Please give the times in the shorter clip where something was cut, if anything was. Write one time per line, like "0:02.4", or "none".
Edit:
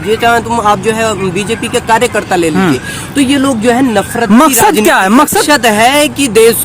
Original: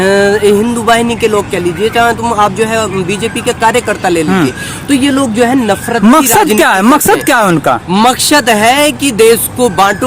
0:05.4